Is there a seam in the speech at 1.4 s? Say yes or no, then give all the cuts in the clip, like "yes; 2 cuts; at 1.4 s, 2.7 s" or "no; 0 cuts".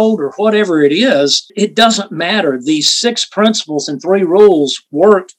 yes; 1 cut; at 1.4 s